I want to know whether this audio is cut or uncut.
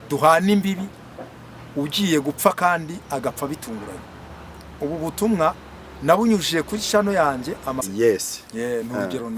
cut